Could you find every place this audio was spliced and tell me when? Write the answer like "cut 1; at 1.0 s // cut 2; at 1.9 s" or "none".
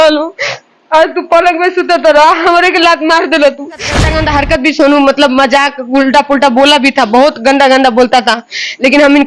cut 1; at 4.1 s